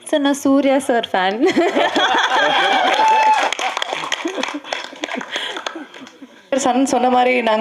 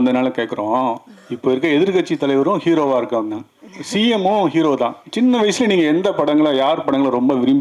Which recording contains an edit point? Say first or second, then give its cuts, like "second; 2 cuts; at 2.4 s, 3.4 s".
first; 1 cut; at 6.5 s